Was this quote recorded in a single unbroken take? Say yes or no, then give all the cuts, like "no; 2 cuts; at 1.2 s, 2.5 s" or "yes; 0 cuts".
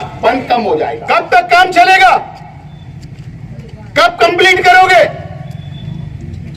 no; 1 cut; at 0.9 s